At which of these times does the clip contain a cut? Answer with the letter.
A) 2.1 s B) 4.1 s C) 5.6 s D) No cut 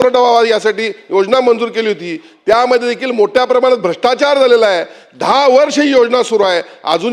D